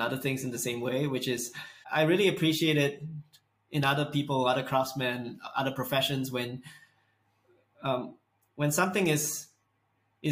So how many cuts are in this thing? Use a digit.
1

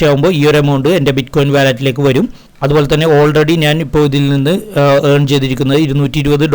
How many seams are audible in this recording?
1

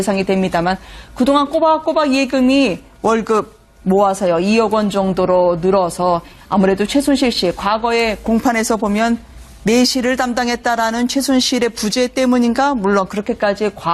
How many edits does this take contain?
1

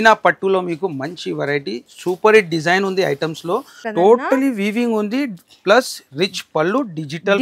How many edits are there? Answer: 1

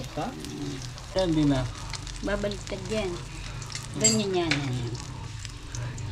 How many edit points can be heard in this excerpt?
1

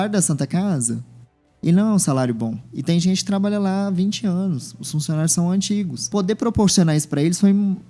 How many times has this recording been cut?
1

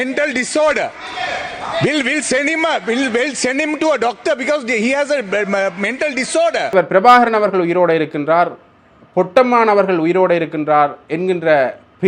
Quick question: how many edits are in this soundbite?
1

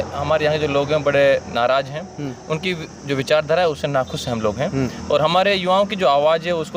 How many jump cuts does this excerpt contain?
0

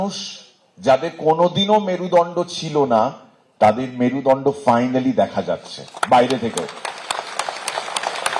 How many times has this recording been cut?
0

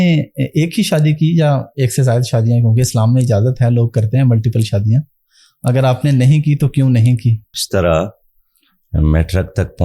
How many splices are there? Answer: 1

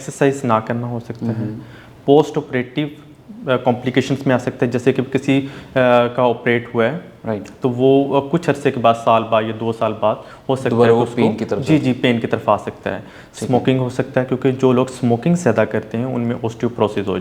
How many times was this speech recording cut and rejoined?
0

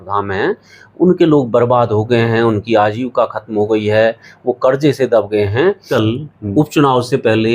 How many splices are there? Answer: 1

